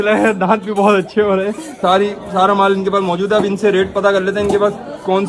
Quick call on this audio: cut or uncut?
cut